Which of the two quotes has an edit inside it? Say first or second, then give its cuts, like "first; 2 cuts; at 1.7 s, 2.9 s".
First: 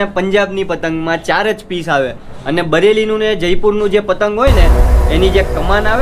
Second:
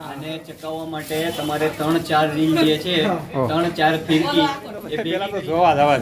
second; 1 cut; at 5.0 s